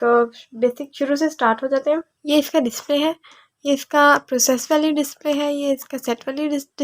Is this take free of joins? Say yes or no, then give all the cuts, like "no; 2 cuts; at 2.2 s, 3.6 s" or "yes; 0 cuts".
no; 1 cut; at 2.1 s